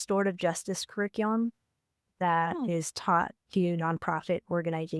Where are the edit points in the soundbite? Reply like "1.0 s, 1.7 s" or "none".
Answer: none